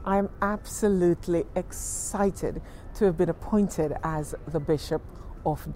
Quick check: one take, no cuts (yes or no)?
yes